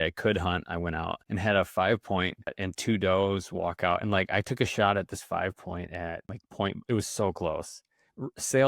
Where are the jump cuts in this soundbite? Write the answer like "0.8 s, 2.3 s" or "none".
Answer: 1.2 s, 2.7 s, 6.4 s